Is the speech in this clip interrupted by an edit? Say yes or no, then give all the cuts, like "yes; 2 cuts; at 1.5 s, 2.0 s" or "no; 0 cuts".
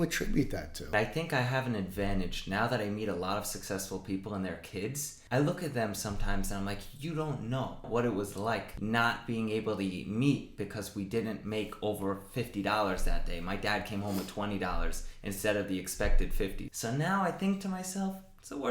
yes; 5 cuts; at 0.9 s, 5.1 s, 7.9 s, 8.7 s, 16.6 s